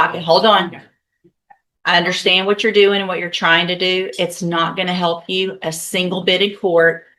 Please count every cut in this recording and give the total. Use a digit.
0